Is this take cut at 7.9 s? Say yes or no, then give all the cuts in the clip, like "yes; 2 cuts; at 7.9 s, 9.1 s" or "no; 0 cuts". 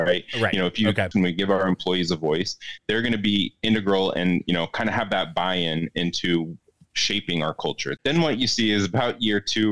yes; 2 cuts; at 1.1 s, 7.9 s